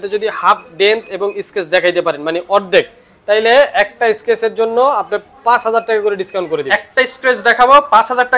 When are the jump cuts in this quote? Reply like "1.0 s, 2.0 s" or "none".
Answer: none